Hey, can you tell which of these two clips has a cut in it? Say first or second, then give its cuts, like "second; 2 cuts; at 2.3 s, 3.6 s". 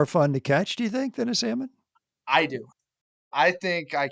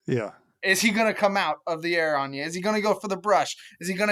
first; 1 cut; at 3.1 s